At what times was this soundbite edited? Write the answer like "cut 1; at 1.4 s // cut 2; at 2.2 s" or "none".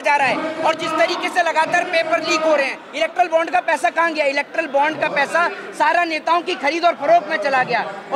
cut 1; at 2.8 s